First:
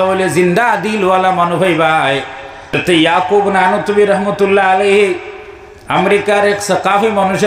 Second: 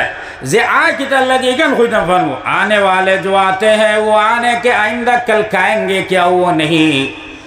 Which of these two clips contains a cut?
first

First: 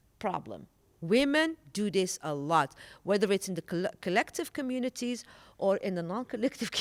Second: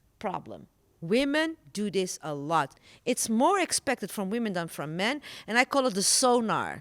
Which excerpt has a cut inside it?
second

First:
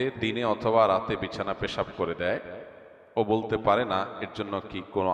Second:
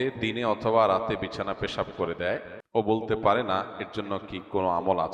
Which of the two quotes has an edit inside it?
second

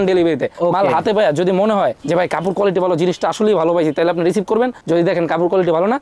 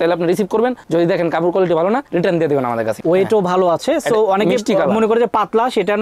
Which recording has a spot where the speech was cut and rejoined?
second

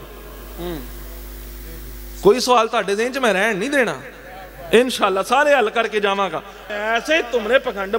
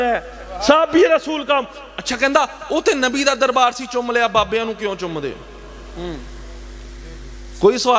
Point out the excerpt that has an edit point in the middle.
first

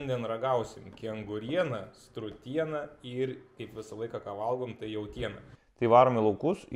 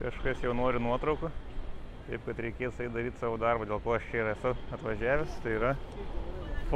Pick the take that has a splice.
first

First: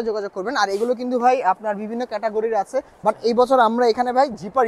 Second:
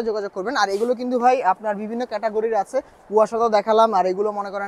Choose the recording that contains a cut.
first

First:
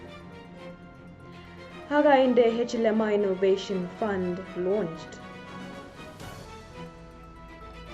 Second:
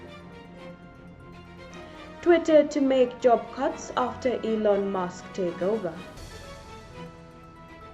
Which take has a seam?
first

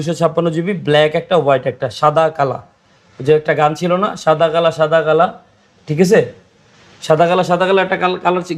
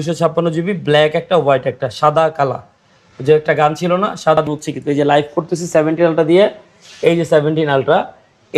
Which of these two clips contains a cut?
second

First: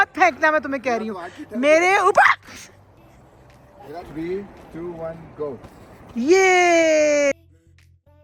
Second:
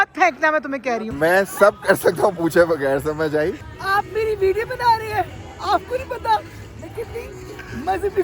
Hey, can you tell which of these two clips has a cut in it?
second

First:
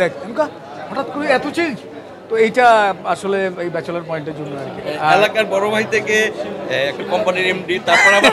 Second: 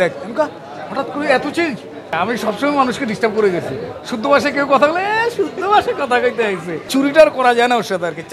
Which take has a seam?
second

